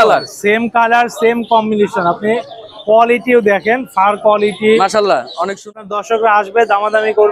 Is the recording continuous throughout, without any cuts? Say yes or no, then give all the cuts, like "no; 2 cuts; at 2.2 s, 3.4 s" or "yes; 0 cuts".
no; 1 cut; at 5.6 s